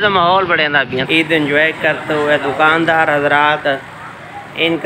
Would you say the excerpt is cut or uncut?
cut